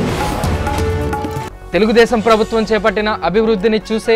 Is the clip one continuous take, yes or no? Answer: no